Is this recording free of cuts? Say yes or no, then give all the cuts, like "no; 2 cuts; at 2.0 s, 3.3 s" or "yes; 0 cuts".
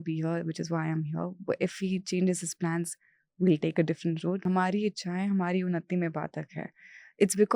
no; 1 cut; at 4.4 s